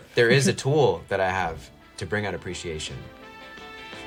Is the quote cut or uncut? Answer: uncut